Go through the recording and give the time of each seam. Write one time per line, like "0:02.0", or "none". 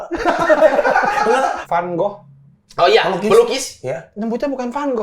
0:01.6